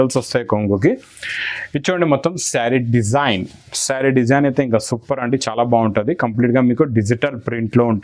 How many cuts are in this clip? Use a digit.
0